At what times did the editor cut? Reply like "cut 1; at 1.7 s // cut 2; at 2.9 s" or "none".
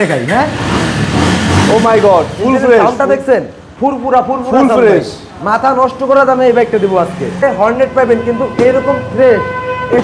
cut 1; at 7.4 s